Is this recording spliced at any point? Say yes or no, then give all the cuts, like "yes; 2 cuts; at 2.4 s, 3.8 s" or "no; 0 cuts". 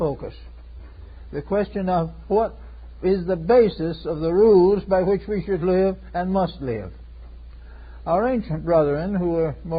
no; 0 cuts